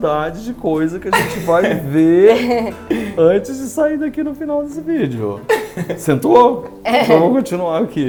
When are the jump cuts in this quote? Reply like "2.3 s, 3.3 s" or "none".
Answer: none